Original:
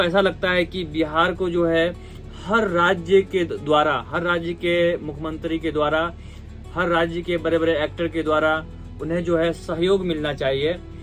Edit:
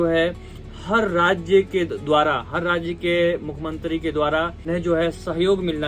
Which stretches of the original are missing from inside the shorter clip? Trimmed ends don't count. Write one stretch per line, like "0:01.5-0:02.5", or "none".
0:06.2-0:09.0